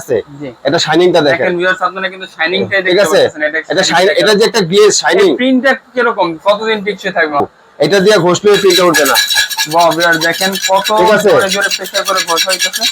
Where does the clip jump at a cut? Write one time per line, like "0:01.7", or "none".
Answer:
0:07.4